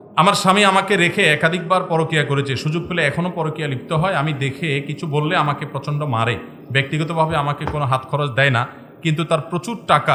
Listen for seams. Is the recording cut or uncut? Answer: uncut